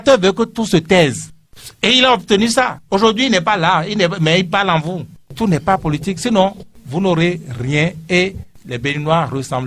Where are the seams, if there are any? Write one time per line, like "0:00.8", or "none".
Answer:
0:05.2